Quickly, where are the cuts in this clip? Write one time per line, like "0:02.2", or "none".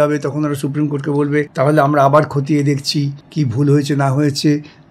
0:01.5
0:03.2